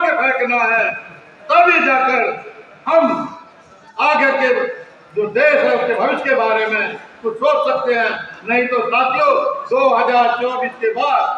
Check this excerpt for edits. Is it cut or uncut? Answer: uncut